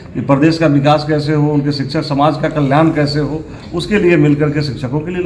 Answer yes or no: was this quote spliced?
no